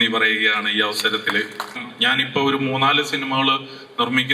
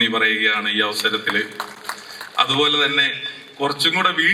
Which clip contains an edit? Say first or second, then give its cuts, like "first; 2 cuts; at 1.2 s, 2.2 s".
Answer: first; 1 cut; at 1.9 s